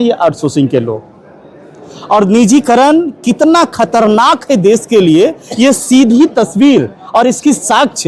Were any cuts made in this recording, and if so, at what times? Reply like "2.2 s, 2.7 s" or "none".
none